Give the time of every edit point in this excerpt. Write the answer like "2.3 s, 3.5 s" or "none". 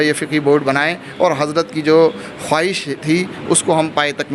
none